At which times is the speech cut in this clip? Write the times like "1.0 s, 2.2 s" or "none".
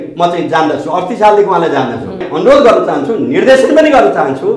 2.2 s